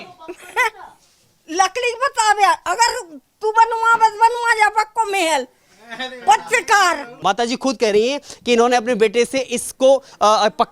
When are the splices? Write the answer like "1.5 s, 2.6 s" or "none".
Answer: none

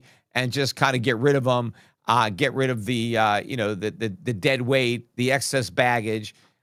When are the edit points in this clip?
none

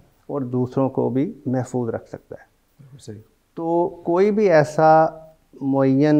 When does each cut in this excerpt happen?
none

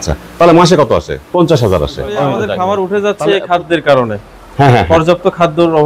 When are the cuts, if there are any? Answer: 1.2 s, 2.4 s

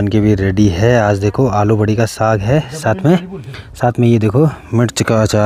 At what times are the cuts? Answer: none

